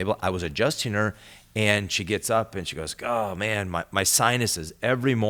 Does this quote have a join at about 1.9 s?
no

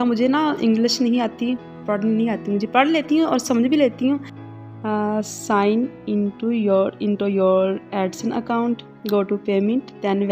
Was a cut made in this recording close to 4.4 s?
yes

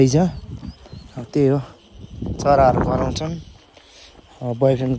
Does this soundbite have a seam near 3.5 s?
no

